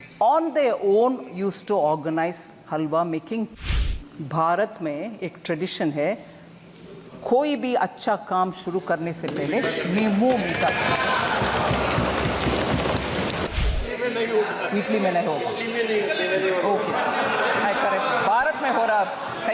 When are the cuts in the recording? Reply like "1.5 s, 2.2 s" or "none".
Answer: 3.6 s, 13.5 s